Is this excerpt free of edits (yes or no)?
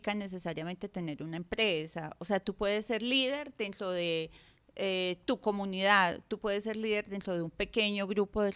yes